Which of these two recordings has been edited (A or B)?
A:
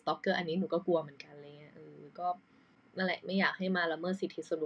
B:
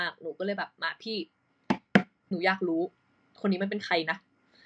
B